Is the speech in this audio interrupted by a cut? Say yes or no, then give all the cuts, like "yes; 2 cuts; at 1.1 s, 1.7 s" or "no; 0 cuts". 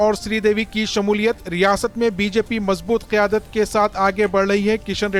no; 0 cuts